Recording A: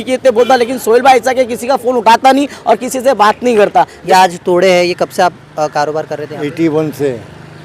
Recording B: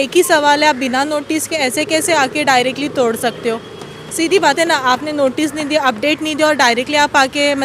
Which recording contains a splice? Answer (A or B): A